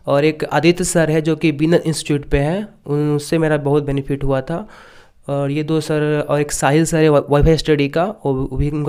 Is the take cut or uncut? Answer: uncut